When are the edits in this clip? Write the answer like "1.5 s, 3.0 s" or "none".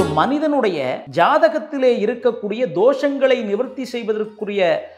1.0 s